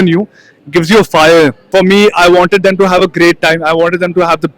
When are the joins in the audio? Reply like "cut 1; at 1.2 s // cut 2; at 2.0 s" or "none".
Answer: cut 1; at 1.7 s

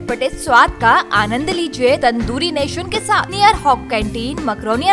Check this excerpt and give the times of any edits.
cut 1; at 2.0 s // cut 2; at 3.3 s

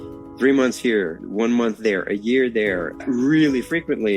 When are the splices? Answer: cut 1; at 1.2 s // cut 2; at 3.0 s

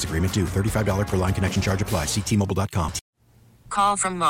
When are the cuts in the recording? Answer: cut 1; at 3.0 s

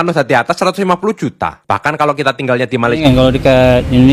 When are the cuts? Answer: cut 1; at 3.0 s

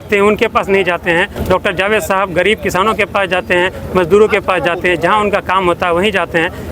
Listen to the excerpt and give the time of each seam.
none

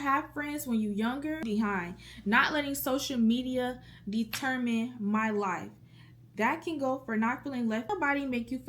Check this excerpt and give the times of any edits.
cut 1; at 1.4 s // cut 2; at 7.9 s

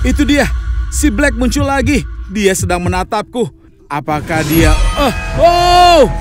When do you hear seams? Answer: none

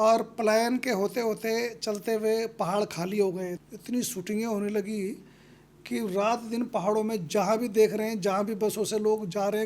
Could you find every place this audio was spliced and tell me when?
cut 1; at 3.6 s

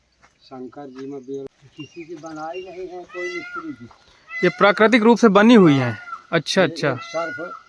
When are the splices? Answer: cut 1; at 1.6 s

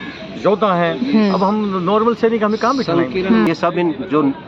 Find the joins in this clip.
cut 1; at 3.5 s

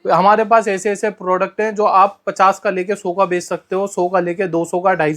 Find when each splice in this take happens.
none

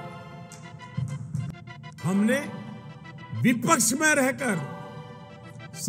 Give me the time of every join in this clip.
cut 1; at 1.6 s

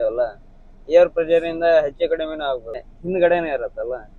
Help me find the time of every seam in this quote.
cut 1; at 2.9 s

